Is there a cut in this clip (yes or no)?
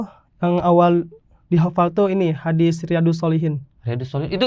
no